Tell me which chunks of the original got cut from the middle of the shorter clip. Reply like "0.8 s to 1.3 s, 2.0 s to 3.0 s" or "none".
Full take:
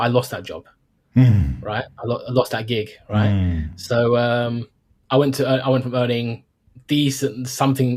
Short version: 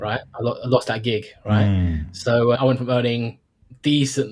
4.2 s to 5.6 s